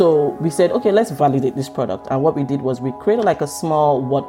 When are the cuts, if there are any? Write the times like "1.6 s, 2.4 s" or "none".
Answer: 1.1 s